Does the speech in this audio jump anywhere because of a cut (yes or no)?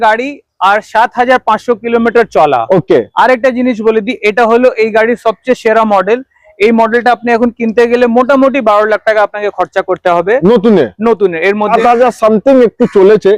yes